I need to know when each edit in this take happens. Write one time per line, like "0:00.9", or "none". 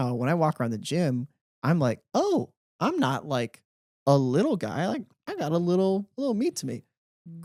none